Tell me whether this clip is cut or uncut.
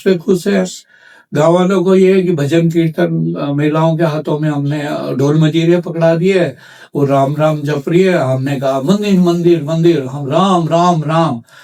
uncut